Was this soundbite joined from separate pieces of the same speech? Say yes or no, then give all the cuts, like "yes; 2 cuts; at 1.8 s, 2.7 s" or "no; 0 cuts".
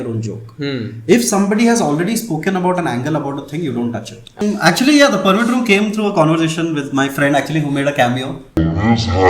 yes; 1 cut; at 4.4 s